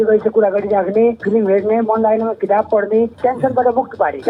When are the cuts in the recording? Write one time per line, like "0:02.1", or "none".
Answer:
0:01.2
0:03.1